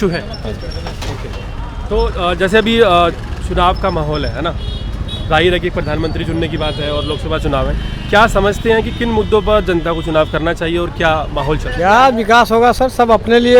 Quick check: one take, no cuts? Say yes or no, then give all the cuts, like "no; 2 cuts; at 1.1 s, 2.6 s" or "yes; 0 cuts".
no; 1 cut; at 11.7 s